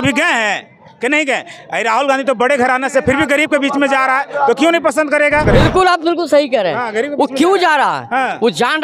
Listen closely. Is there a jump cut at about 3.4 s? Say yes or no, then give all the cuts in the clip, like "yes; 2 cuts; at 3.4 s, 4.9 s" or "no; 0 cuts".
no; 1 cut; at 5.4 s